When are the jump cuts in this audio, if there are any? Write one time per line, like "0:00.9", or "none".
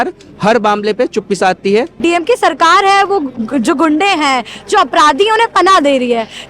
0:02.0

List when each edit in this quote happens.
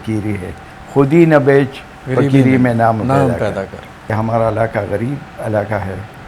0:04.1

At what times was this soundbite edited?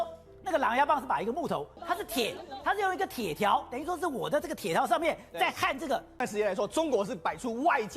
0:01.7
0:06.2

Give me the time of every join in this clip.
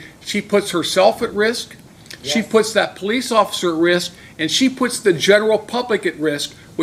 none

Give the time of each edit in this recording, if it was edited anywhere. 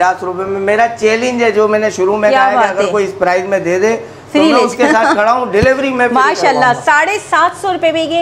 none

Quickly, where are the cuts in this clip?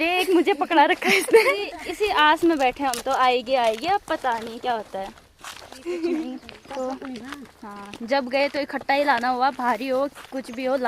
0:01.8
0:06.3

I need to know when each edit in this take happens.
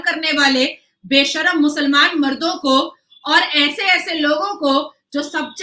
none

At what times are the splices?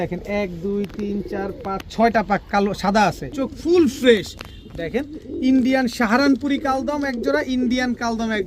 0:03.4

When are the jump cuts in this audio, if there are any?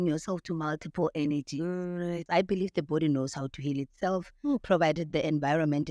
0:02.2

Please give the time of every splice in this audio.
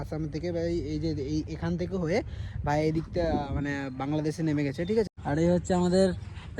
0:05.2

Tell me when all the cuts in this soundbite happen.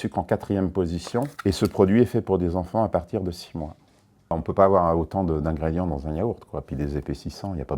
0:01.3
0:04.2

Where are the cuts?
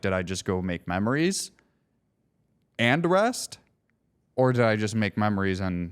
none

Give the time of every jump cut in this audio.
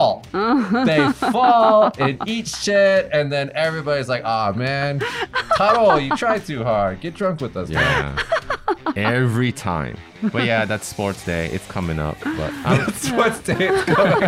0:10.2

